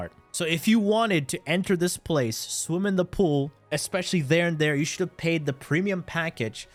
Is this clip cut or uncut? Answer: uncut